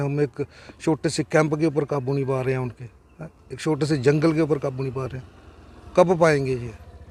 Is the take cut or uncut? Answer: uncut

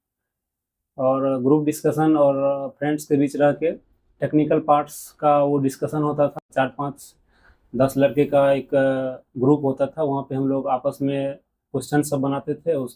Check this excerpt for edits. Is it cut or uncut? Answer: cut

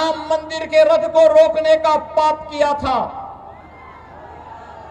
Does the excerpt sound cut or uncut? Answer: uncut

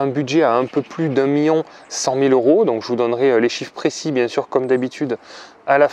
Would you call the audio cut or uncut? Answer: uncut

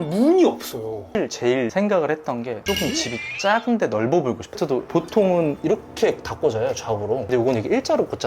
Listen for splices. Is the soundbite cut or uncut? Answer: cut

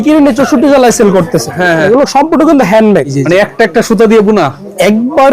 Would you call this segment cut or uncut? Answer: cut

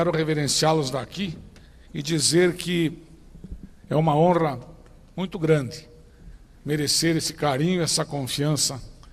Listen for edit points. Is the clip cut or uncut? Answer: uncut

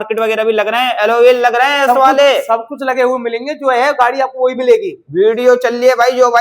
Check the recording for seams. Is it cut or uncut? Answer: uncut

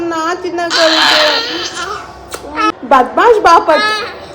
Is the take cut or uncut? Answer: cut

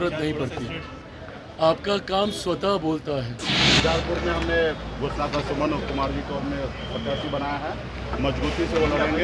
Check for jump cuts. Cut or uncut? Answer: cut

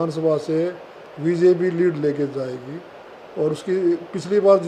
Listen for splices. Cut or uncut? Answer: uncut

